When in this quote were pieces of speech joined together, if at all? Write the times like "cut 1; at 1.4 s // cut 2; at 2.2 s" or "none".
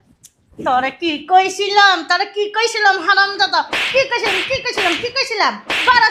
none